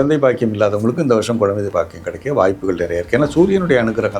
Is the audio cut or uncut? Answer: uncut